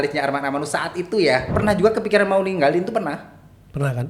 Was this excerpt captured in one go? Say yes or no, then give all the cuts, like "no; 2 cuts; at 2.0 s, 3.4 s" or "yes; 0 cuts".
no; 1 cut; at 1.5 s